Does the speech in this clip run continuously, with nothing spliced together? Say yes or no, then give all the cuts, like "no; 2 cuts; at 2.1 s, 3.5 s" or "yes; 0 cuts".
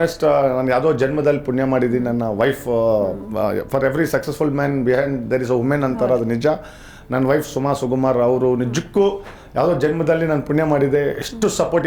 yes; 0 cuts